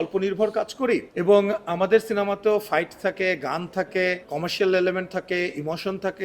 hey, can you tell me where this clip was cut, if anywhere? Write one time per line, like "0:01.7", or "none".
0:01.1
0:04.3